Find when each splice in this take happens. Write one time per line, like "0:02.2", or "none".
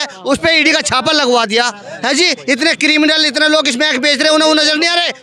none